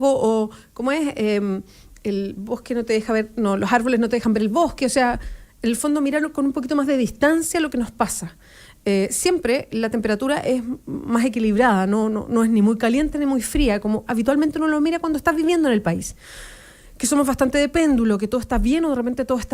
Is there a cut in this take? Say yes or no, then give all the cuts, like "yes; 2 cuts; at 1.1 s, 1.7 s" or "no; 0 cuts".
no; 0 cuts